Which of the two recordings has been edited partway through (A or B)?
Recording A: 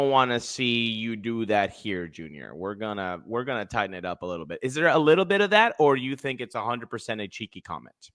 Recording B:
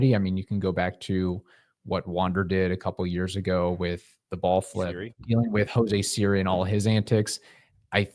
B